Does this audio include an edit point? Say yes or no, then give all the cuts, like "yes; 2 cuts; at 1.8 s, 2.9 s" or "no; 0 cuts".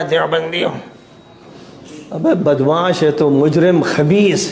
no; 0 cuts